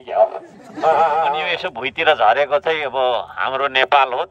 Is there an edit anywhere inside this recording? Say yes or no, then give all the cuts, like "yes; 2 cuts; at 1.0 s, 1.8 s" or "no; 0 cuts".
yes; 1 cut; at 1.5 s